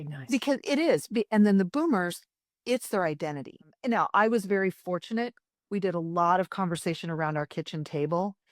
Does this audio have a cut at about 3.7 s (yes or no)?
yes